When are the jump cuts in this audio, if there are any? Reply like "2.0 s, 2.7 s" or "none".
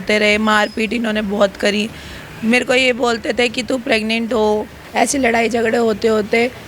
4.8 s